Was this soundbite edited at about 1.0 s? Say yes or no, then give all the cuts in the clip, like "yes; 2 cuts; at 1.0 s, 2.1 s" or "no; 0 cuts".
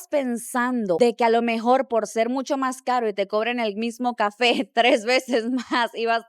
yes; 1 cut; at 1.0 s